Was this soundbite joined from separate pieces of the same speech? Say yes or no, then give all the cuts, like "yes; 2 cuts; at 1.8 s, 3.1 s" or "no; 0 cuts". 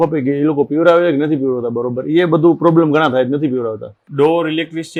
no; 0 cuts